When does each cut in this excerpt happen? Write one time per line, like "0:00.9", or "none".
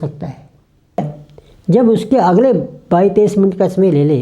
0:01.0